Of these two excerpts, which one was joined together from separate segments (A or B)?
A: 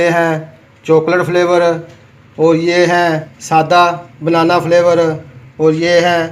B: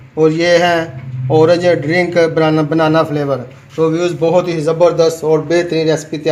A